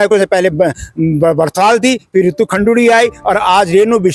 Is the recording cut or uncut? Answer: uncut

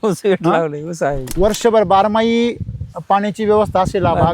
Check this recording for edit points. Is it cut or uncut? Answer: cut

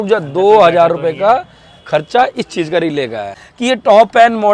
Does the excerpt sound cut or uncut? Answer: cut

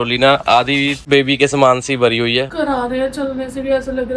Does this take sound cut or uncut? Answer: cut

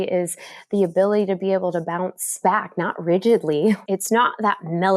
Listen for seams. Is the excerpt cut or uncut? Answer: cut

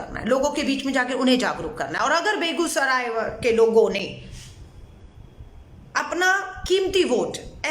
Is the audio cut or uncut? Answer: uncut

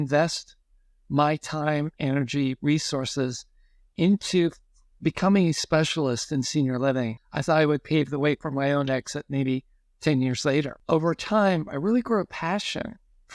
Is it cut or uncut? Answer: cut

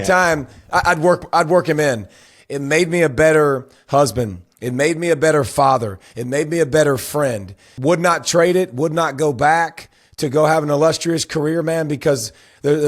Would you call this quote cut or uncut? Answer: cut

